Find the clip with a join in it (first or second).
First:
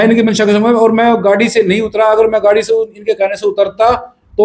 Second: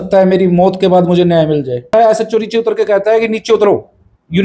second